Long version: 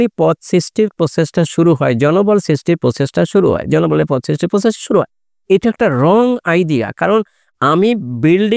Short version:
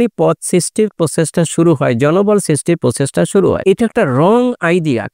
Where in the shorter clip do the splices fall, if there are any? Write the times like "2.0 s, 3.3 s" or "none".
3.6 s